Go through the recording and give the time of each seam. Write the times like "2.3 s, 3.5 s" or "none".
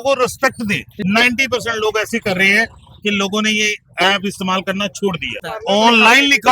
0.9 s, 5.5 s